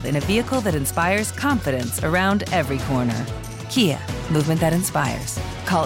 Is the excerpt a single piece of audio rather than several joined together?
yes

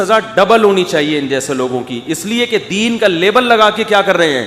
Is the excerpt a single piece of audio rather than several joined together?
yes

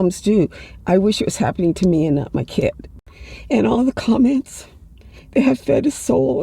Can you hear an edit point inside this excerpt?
yes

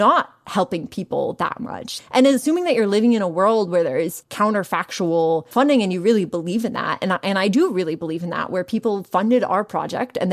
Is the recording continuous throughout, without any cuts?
no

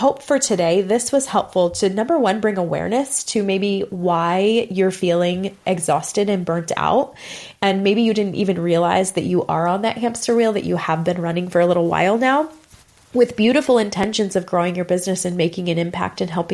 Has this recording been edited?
no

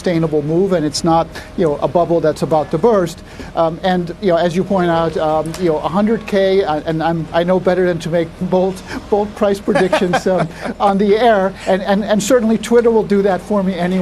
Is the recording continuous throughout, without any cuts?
yes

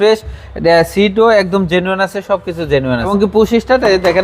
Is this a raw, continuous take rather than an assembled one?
no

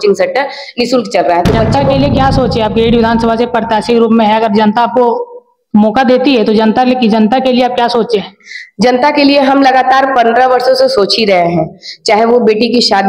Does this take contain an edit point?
yes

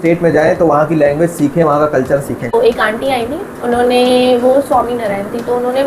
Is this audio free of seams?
no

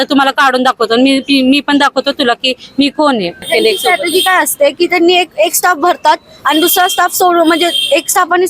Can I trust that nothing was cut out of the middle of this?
no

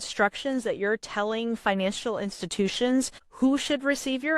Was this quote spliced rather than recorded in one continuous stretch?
yes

